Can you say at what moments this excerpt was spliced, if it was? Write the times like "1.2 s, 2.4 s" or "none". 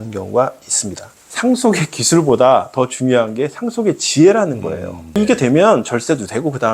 1.3 s, 5.2 s